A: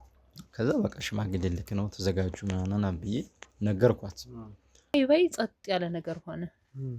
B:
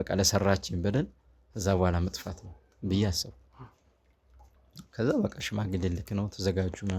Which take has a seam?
A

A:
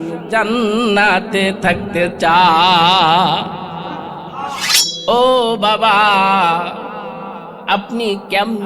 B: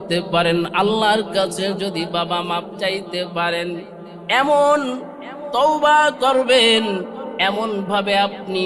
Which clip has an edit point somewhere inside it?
A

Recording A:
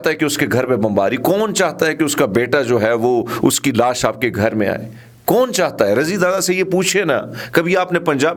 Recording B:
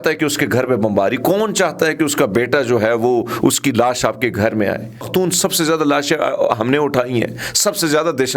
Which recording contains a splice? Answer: B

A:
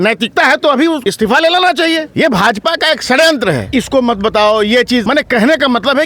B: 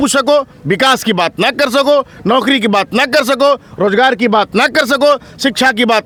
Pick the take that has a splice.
A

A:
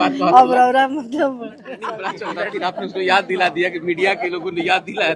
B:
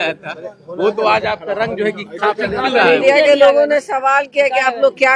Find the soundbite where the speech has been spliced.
A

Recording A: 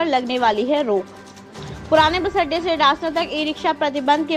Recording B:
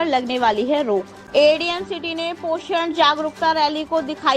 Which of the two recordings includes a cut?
B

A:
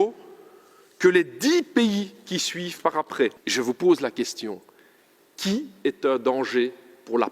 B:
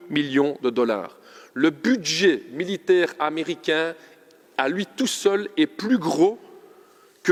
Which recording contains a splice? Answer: A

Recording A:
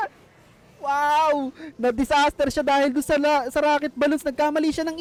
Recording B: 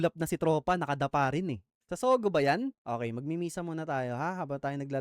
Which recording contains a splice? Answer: B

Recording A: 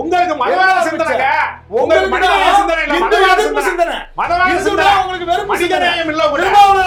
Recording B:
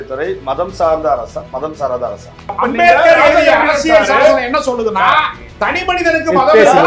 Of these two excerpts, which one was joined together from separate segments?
B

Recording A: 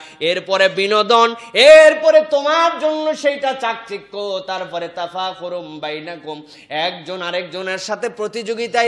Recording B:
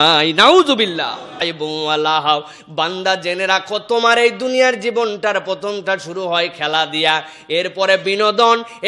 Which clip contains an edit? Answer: B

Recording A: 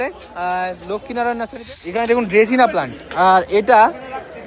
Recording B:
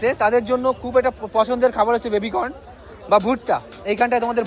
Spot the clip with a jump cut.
A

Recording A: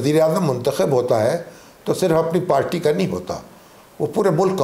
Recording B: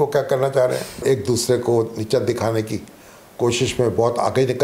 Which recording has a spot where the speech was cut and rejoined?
B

